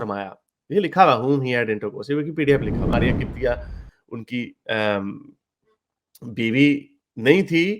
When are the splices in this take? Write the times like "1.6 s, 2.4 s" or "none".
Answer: 2.9 s